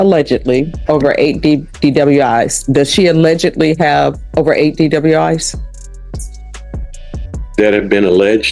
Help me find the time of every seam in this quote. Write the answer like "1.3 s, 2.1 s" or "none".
none